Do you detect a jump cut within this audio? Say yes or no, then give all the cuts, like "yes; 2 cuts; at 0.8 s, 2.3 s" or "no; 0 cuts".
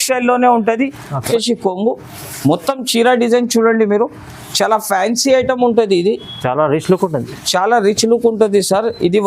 yes; 1 cut; at 1.3 s